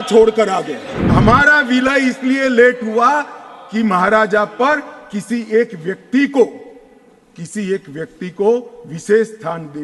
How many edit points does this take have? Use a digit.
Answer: 1